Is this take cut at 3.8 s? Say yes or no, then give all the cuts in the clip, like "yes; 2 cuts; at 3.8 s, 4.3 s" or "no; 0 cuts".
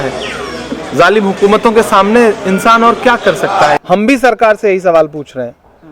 yes; 1 cut; at 3.8 s